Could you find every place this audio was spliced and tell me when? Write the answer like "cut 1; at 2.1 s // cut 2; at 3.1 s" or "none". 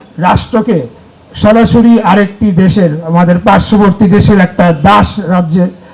none